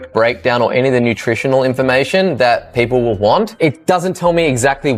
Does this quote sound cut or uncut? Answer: uncut